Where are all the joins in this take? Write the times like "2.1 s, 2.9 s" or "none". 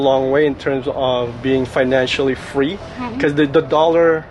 none